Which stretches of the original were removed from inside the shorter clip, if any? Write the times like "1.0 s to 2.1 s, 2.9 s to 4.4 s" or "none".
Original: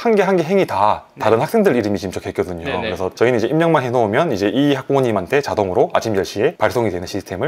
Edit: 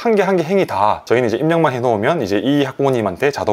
1.0 s to 3.1 s